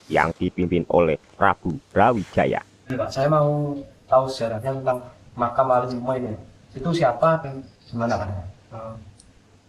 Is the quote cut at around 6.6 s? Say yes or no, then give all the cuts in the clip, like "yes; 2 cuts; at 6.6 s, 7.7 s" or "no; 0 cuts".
no; 1 cut; at 2.8 s